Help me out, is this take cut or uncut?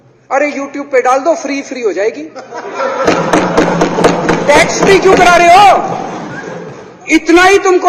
uncut